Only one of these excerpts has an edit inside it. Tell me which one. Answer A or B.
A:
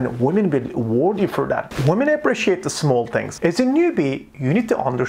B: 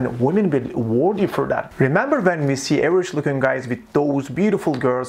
A